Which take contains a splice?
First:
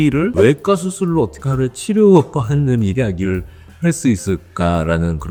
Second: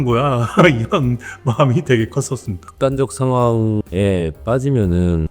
second; 2 cuts; at 2.6 s, 3.8 s

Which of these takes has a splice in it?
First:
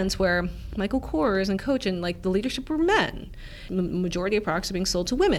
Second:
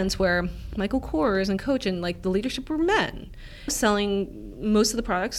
first; 1 cut; at 3.6 s

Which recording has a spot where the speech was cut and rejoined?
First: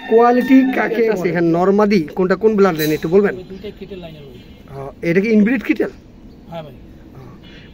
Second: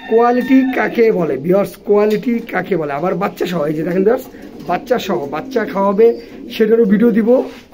first; 1 cut; at 1.1 s

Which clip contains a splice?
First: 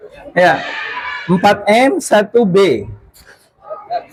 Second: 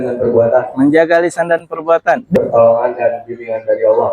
second; 1 cut; at 2.3 s

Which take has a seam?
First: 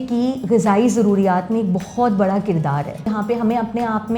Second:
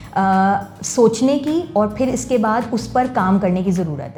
first; 1 cut; at 3.1 s

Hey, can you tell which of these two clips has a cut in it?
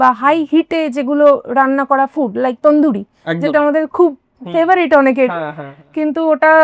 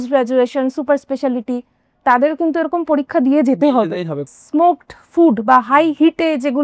second; 1 cut; at 4.3 s

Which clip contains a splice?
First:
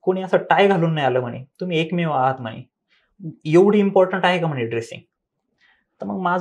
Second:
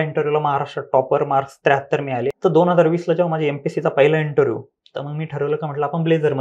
second; 1 cut; at 2.4 s

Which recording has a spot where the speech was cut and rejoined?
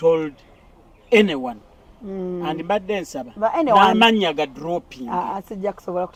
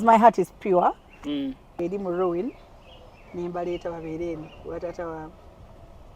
second; 1 cut; at 1.7 s

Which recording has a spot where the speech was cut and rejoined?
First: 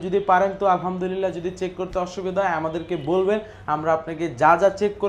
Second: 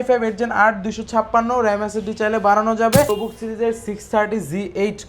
second; 1 cut; at 3.1 s

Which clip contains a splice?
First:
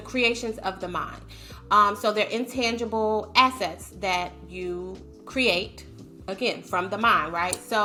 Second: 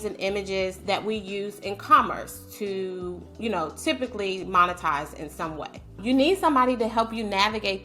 second; 1 cut; at 6.0 s

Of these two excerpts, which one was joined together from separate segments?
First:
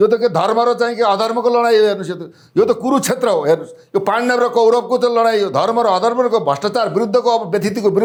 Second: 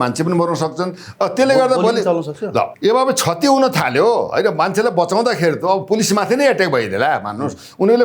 second; 1 cut; at 2.7 s

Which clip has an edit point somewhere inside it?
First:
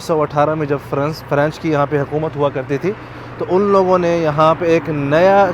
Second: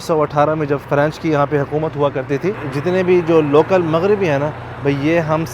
second; 2 cuts; at 0.8 s, 2.7 s

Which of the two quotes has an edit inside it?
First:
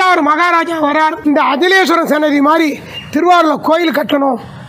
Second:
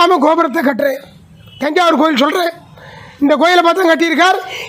first; 1 cut; at 1.2 s

